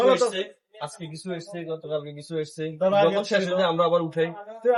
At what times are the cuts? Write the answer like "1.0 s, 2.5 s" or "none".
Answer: none